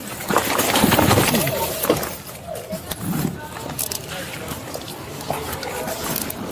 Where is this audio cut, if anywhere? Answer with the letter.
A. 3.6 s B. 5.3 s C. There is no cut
C